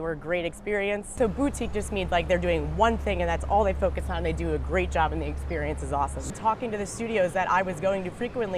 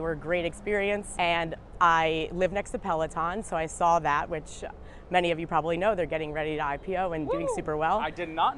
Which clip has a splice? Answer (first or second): first